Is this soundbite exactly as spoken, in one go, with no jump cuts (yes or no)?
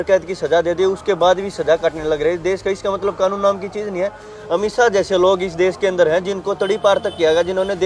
yes